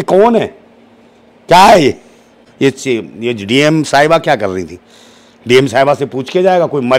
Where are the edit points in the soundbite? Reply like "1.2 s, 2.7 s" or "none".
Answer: 2.5 s